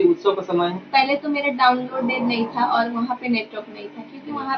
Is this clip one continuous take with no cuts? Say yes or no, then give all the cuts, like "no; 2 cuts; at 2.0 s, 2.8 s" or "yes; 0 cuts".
yes; 0 cuts